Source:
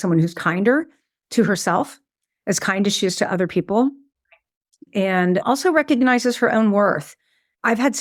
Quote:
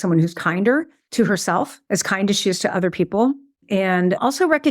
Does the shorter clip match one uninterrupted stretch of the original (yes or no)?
no